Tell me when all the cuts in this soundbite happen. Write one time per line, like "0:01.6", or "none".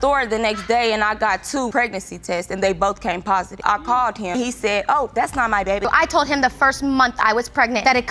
0:05.8